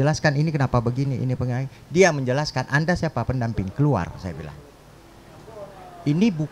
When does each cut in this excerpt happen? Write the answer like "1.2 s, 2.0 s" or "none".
none

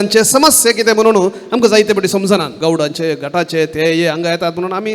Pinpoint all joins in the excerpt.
2.5 s

